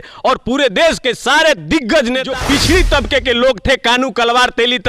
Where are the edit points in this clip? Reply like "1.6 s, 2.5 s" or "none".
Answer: 2.3 s